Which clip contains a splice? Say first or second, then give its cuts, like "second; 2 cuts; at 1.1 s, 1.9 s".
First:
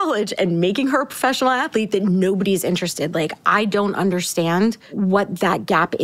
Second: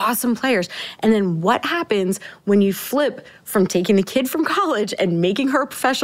first; 1 cut; at 4.9 s